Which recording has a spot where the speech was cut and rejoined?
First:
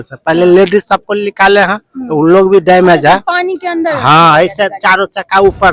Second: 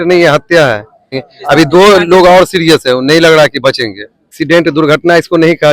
second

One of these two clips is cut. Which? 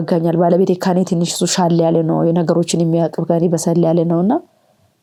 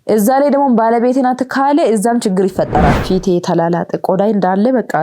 second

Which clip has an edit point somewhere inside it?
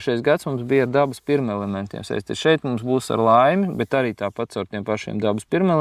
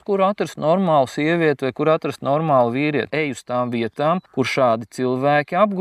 second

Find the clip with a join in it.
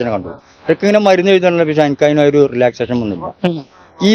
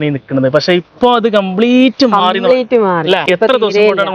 second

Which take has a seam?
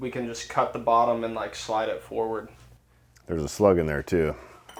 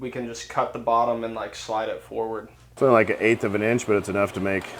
second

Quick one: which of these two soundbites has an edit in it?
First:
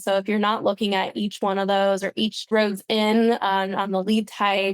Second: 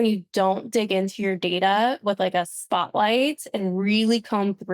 first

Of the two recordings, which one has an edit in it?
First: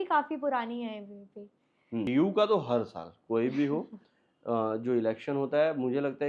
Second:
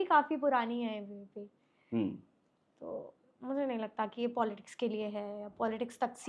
first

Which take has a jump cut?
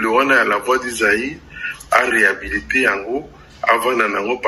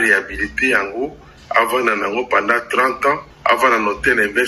second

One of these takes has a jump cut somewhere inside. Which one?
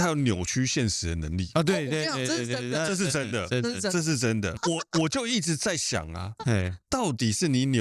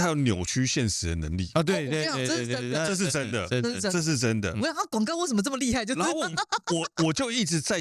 first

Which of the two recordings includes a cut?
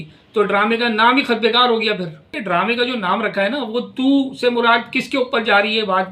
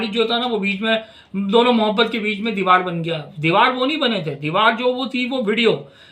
first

